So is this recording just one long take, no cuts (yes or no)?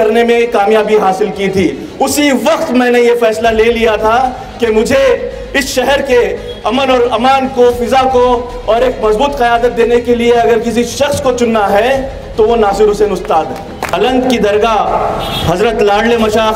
no